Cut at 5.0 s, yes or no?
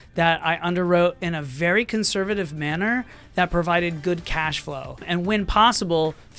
yes